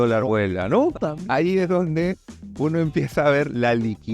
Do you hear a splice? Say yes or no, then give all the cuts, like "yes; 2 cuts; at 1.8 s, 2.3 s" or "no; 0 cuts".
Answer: yes; 1 cut; at 1.0 s